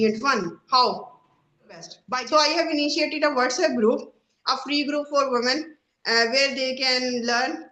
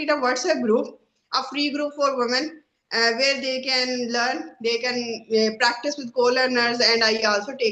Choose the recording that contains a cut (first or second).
first